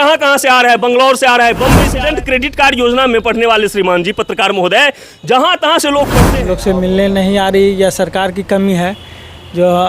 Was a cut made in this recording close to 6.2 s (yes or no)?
yes